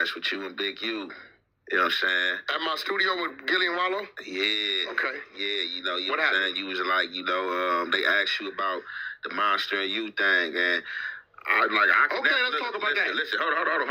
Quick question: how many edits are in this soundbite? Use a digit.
0